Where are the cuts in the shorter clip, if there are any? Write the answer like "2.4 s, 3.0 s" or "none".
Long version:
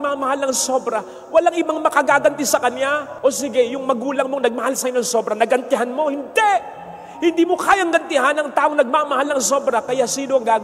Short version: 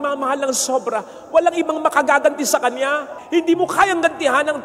3.1 s